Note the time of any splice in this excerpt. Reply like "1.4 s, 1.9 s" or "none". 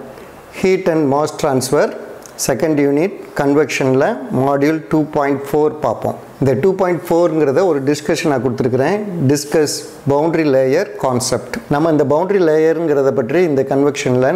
6.2 s, 11.5 s